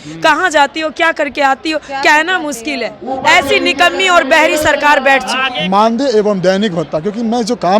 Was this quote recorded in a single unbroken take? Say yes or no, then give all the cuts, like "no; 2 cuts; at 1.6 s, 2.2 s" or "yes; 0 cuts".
no; 2 cuts; at 2.9 s, 5.5 s